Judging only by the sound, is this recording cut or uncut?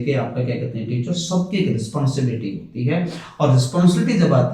uncut